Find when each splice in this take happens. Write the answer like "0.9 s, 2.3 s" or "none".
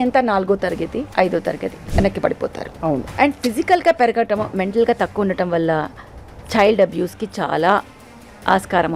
1.1 s, 1.8 s, 3.1 s